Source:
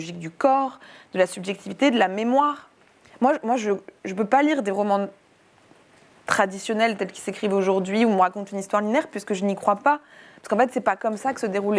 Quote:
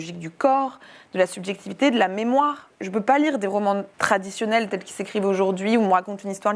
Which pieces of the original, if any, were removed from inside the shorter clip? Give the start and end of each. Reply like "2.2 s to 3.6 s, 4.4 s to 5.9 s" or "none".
2.7 s to 4.0 s, 5.2 s to 6.2 s